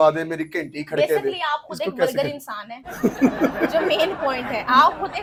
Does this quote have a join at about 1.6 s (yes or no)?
no